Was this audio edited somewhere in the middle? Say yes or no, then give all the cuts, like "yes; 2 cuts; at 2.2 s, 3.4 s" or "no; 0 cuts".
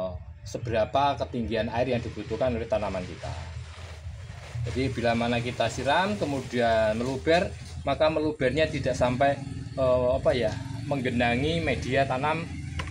no; 0 cuts